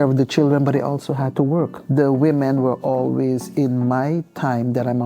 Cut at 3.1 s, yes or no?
no